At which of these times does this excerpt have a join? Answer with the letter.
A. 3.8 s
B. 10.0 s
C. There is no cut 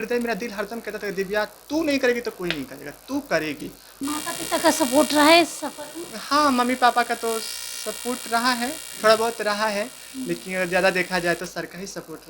A